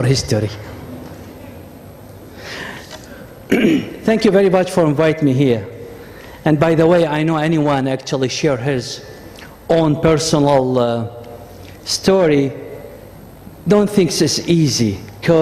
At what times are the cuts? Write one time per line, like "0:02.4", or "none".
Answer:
0:07.8